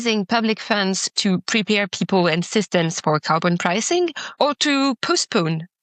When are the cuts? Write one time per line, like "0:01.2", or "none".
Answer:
0:04.2